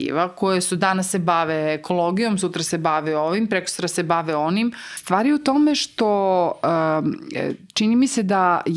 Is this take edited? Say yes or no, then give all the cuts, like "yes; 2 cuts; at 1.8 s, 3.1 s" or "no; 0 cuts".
yes; 1 cut; at 4.9 s